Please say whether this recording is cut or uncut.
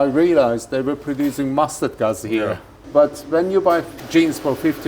cut